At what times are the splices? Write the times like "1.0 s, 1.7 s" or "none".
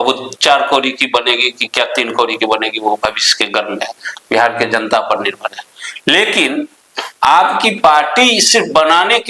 none

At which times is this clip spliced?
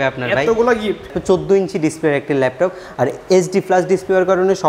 1.1 s

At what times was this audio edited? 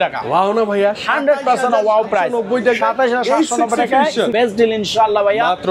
4.3 s

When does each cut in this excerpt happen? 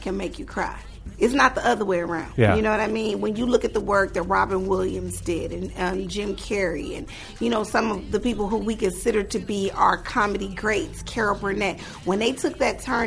1.1 s, 2.2 s

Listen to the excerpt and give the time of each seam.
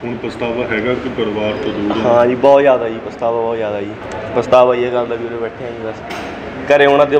4.0 s

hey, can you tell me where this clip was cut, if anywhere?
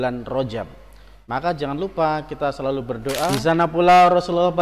3.4 s

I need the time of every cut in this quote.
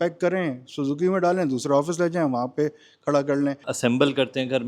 3.7 s

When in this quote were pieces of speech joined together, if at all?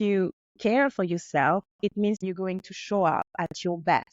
2.2 s, 3.3 s

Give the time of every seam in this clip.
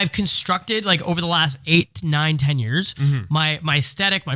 none

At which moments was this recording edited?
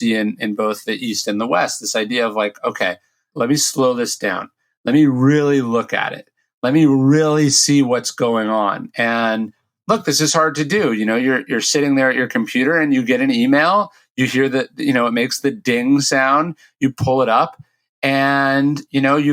3.2 s

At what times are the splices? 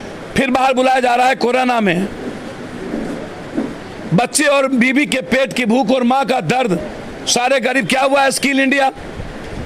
none

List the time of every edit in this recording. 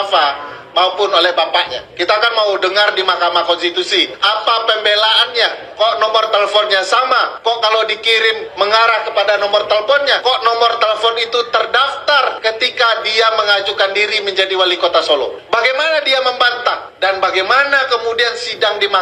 1.8 s, 4.2 s, 5.6 s, 7.3 s, 8.4 s, 10.2 s, 12.4 s, 15.4 s, 16.9 s

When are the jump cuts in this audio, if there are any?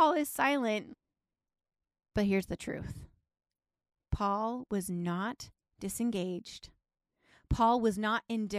0.9 s

